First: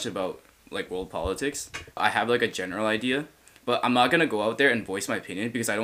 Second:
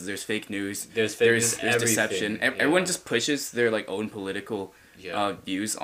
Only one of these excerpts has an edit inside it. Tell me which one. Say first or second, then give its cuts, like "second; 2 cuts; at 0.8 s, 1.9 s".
first; 1 cut; at 2.0 s